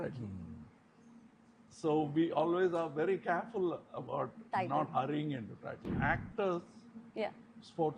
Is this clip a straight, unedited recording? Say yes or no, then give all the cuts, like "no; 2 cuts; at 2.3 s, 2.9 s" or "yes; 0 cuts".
no; 1 cut; at 5.7 s